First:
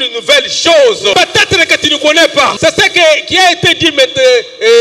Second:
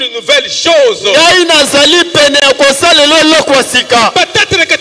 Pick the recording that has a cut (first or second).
first